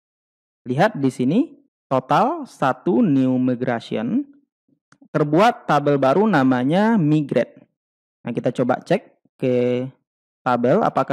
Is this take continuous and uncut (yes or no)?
yes